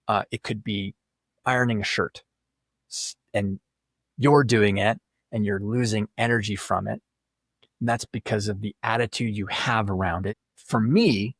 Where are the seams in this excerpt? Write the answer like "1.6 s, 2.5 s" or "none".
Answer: 10.4 s

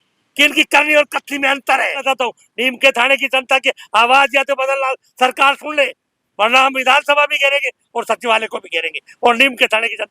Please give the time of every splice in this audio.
2.0 s

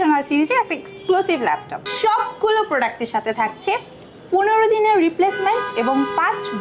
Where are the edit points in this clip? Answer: 1.7 s

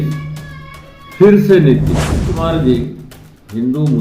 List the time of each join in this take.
2.4 s

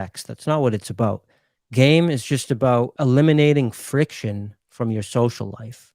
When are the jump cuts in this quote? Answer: 2.9 s

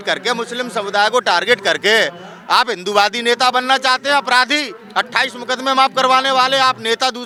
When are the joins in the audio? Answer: none

